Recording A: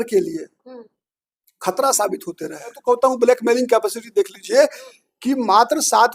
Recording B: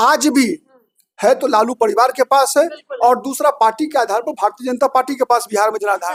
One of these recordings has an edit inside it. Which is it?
A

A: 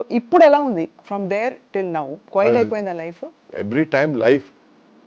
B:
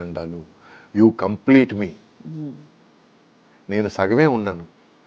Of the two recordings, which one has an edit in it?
A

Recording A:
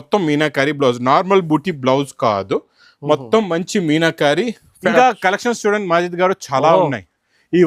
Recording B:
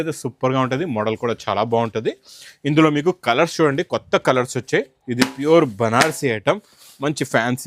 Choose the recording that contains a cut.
A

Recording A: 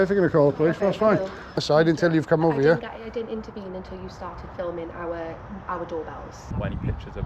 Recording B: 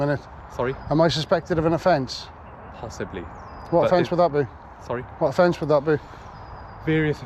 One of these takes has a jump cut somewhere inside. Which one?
A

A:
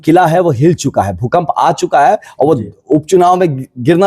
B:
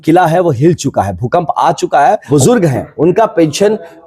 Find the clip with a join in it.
B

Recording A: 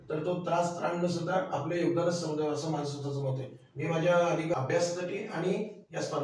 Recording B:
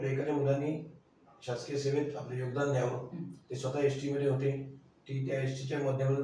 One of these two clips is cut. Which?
A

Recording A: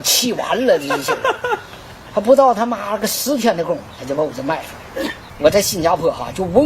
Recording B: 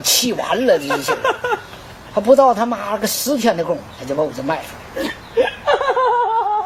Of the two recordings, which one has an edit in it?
A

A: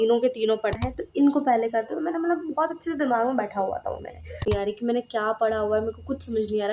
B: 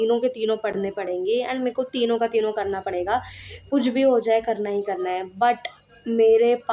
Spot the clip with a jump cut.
A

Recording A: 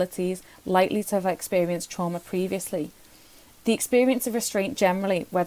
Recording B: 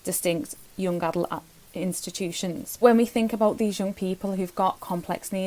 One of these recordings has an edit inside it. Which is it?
B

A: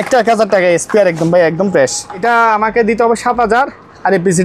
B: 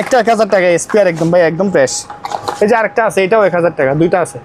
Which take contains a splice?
A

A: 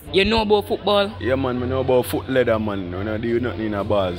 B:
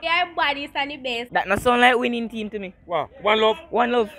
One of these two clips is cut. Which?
A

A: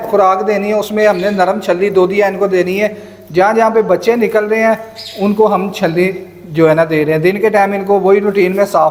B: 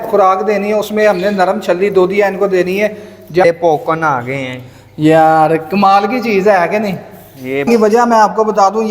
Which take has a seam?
B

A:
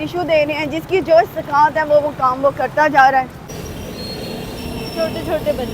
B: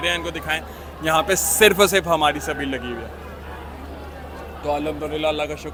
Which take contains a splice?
A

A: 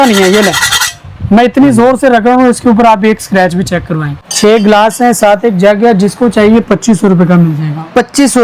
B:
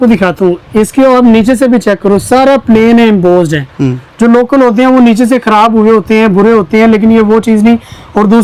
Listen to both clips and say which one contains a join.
A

